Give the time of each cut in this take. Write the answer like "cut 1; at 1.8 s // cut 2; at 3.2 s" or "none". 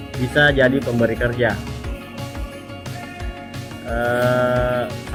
none

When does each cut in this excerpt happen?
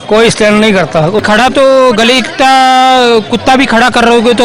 cut 1; at 1.2 s

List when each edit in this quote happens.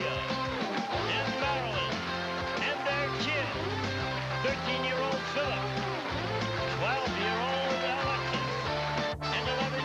none

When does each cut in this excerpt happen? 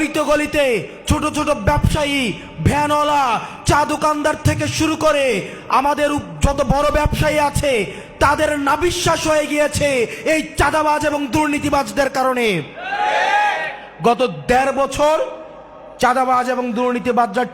none

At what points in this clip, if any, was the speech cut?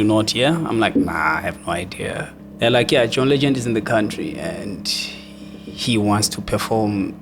cut 1; at 2.4 s

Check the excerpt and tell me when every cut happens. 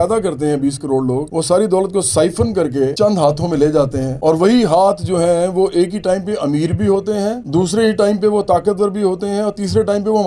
none

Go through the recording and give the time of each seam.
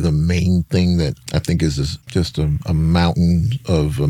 cut 1; at 1.2 s // cut 2; at 1.9 s

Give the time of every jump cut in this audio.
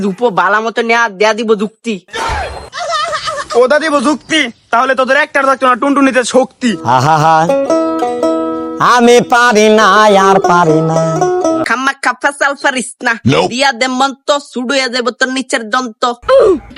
cut 1; at 11.6 s

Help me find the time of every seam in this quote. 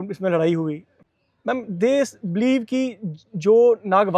cut 1; at 0.9 s

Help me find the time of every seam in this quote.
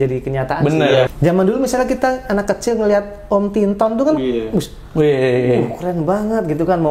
cut 1; at 1.1 s

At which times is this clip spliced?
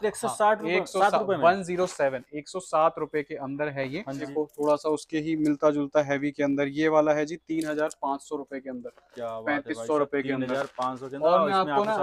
cut 1; at 4.2 s

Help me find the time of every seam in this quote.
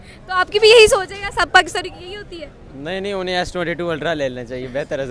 none

